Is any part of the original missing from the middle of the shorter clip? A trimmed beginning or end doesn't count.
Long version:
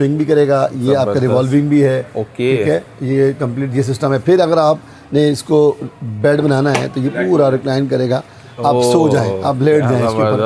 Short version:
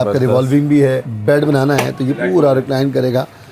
yes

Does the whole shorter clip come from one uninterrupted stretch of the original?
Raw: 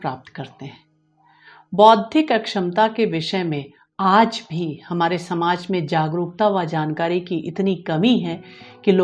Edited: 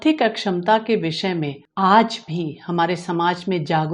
no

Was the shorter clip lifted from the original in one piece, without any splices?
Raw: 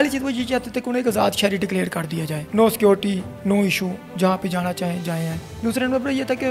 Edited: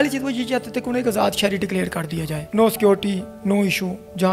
yes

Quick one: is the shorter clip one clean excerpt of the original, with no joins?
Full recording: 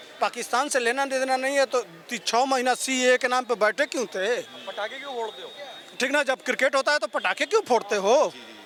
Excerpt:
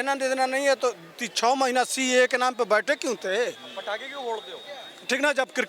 yes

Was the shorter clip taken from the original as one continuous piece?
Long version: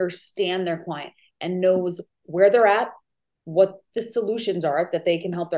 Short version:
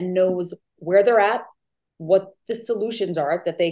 yes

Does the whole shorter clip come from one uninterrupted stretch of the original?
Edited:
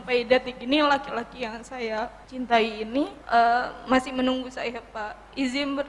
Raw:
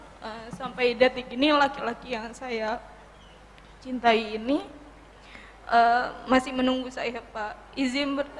no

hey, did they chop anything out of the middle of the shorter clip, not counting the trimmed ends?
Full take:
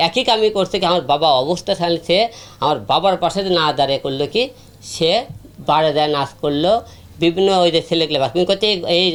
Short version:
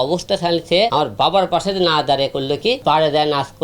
yes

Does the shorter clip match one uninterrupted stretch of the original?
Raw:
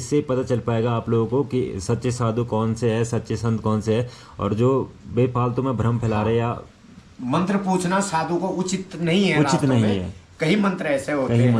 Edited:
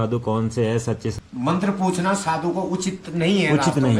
no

